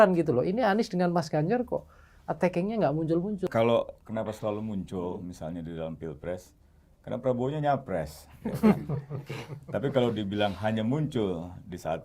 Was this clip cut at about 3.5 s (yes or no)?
yes